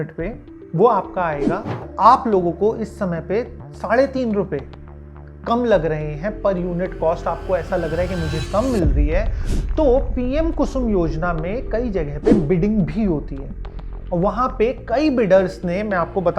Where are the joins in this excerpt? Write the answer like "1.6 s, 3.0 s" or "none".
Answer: 1.9 s